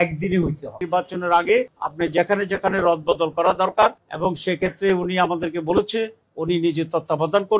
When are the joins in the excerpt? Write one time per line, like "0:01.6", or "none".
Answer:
0:00.8
0:04.1